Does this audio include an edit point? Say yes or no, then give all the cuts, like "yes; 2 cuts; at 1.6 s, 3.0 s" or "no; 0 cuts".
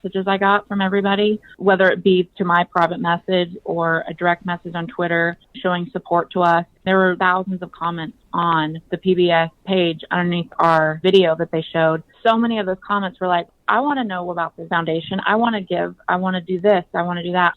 no; 0 cuts